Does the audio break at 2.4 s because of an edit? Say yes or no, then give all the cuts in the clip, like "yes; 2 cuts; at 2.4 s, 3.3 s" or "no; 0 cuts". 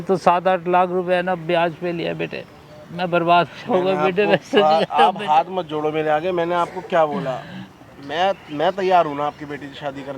no; 0 cuts